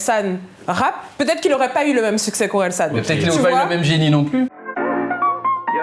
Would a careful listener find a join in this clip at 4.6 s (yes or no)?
yes